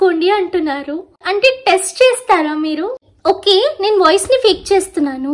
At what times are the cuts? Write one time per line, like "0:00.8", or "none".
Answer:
0:01.2
0:03.1